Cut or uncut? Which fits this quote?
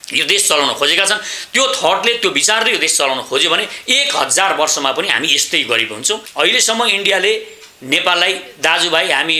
cut